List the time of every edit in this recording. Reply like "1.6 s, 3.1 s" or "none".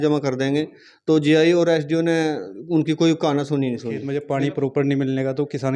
4.1 s